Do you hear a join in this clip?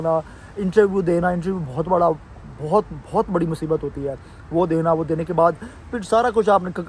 no; 0 cuts

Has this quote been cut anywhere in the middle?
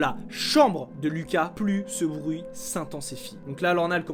no; 0 cuts

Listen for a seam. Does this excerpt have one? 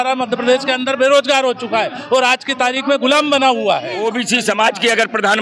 yes; 1 cut; at 4.1 s

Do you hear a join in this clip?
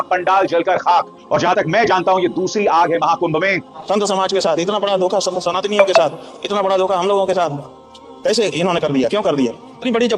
yes; 1 cut; at 4.0 s

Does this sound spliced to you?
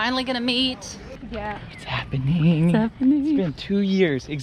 yes; 1 cut; at 1.2 s

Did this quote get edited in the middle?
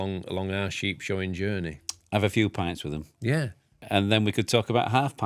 yes; 1 cut; at 3.9 s

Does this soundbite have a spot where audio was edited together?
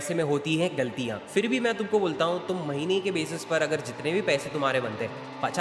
yes; 1 cut; at 1.2 s

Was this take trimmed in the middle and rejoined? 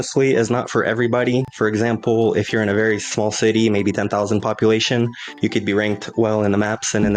no; 0 cuts

